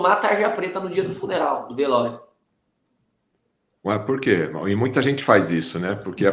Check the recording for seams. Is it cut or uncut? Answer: uncut